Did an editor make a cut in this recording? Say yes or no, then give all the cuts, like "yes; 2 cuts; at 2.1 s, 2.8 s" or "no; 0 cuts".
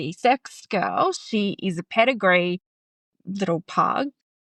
no; 0 cuts